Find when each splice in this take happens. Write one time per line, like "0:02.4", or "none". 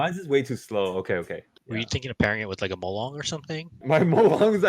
0:01.5
0:03.8